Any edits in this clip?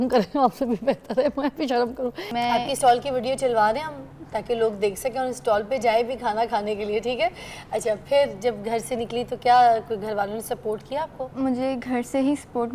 yes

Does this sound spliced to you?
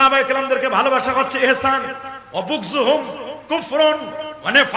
no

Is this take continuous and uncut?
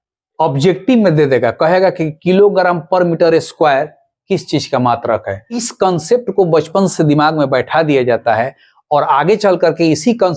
no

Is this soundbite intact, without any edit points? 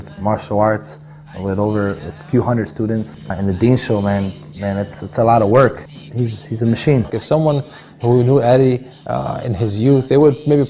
no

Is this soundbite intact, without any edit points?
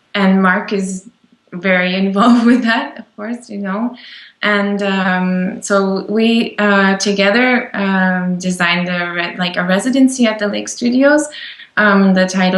no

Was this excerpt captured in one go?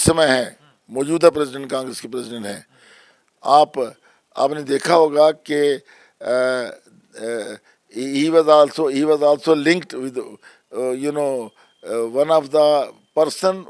yes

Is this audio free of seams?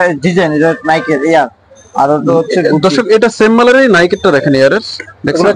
yes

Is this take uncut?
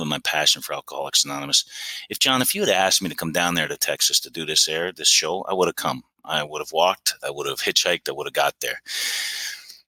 yes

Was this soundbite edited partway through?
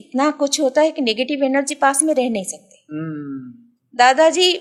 no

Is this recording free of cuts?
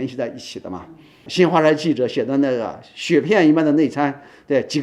no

